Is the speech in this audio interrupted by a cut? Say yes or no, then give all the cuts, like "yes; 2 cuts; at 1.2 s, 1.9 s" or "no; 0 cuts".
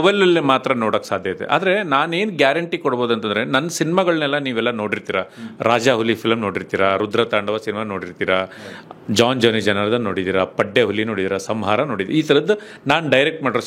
no; 0 cuts